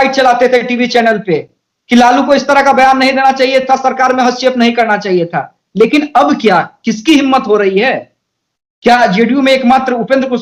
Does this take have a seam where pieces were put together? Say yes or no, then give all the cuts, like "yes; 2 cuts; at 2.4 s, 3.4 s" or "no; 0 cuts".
no; 0 cuts